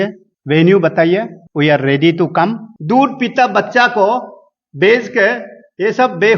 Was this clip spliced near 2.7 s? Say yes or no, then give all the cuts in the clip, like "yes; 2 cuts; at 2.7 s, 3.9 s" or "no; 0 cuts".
yes; 1 cut; at 2.7 s